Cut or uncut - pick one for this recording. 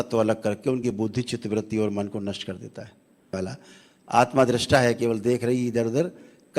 cut